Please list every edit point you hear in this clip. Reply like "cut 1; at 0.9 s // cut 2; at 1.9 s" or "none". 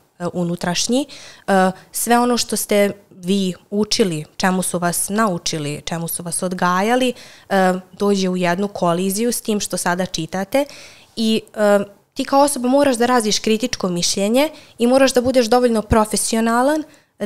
none